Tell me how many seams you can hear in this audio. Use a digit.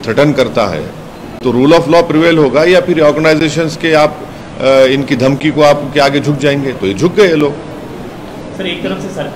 0